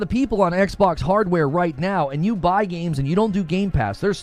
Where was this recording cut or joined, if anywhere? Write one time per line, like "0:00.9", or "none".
none